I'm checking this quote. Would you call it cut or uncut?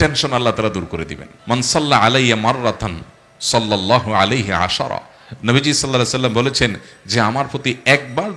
uncut